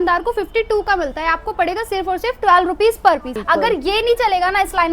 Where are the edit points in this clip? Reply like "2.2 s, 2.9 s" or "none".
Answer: 3.3 s